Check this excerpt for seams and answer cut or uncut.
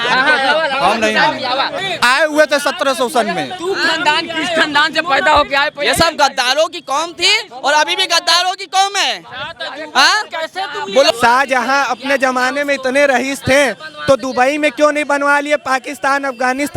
cut